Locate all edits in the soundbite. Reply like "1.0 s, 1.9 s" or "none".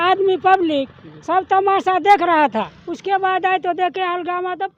2.7 s